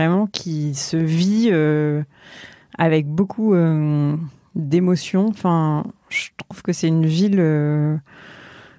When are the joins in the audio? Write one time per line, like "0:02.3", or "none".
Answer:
none